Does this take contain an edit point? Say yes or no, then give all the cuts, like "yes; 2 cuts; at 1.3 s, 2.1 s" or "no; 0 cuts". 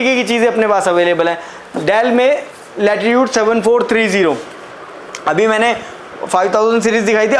no; 0 cuts